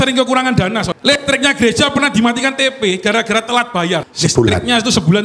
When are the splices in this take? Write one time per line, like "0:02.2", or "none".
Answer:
0:00.9
0:04.1